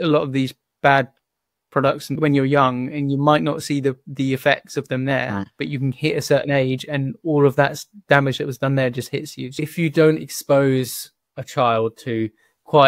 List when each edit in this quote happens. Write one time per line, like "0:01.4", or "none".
0:02.1
0:09.4